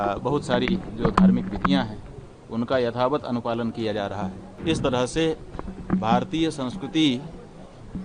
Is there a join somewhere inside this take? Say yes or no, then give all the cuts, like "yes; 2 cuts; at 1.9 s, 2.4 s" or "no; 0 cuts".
yes; 1 cut; at 4.5 s